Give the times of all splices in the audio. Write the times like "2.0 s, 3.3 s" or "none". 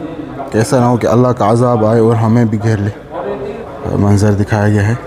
3.6 s